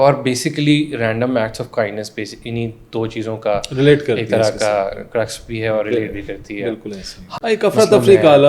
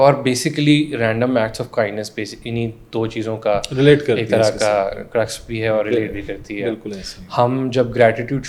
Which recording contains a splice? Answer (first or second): first